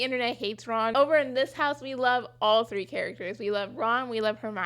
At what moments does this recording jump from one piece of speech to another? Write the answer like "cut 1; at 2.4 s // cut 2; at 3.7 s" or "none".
cut 1; at 0.9 s

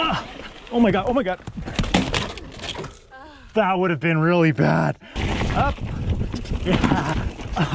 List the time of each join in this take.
cut 1; at 5.1 s

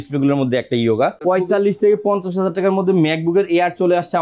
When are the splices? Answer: cut 1; at 1.2 s

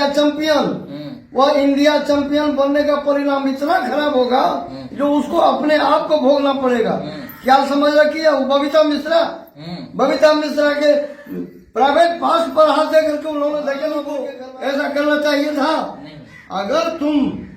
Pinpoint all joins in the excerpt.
cut 1; at 14.2 s

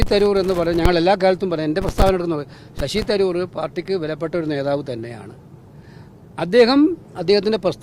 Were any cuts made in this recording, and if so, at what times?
none

